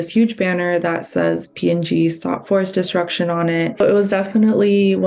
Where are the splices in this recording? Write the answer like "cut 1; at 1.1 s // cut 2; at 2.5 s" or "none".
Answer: cut 1; at 3.8 s

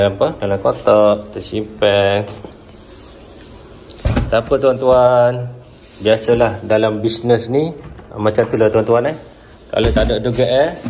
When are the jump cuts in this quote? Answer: none

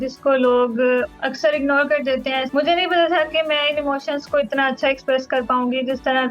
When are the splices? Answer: cut 1; at 2.5 s

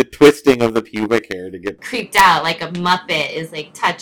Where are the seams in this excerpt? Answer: cut 1; at 1.8 s

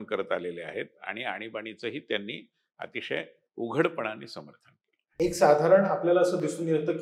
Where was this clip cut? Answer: none

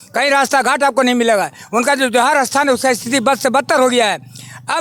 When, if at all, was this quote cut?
none

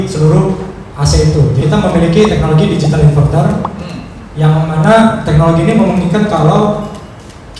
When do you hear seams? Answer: cut 1; at 1.6 s

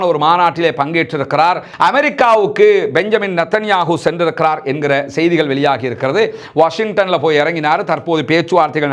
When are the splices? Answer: cut 1; at 1.7 s

